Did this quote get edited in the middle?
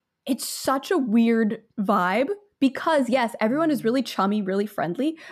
no; 0 cuts

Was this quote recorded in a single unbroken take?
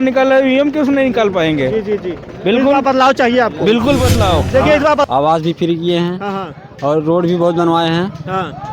no; 1 cut; at 5.1 s

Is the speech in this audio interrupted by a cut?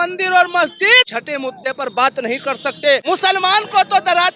yes; 2 cuts; at 1.1 s, 3.0 s

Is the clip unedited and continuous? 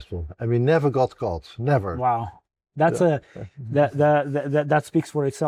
yes; 0 cuts

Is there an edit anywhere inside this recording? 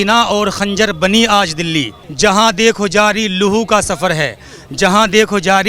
yes; 1 cut; at 2.0 s

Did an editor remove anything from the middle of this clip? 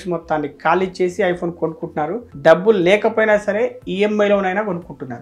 no; 0 cuts

